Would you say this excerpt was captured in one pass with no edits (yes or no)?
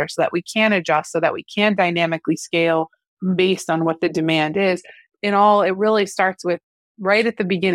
no